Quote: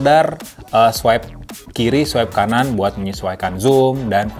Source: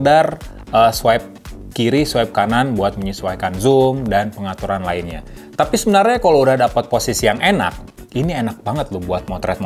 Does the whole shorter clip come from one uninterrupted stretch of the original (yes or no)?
yes